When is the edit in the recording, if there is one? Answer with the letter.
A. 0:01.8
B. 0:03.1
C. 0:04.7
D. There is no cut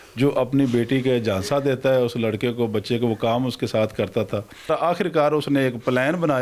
C